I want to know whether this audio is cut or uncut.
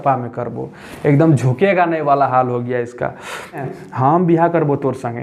cut